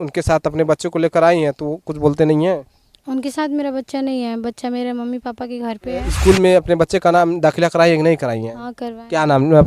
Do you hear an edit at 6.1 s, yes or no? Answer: yes